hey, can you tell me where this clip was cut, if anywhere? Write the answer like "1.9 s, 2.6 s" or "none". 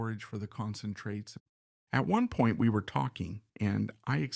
1.4 s, 3.4 s